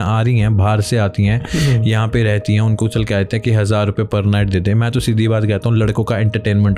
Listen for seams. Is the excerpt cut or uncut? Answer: uncut